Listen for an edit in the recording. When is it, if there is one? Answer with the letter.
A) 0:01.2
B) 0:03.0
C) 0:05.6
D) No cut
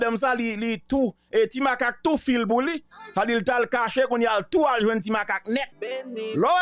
D